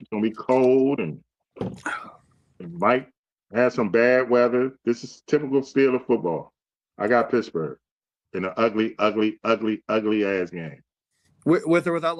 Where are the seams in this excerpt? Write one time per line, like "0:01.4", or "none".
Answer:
none